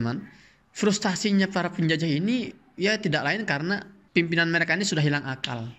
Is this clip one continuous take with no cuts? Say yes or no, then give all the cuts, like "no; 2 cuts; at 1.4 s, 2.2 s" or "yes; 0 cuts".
yes; 0 cuts